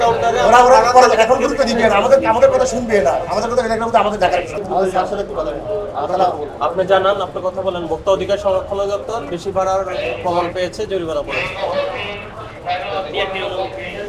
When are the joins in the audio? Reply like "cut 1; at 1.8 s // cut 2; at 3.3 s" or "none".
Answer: cut 1; at 4.6 s